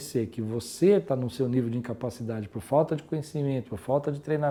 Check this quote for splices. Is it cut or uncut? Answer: uncut